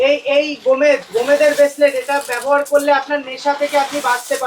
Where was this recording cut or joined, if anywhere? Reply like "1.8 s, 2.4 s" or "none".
none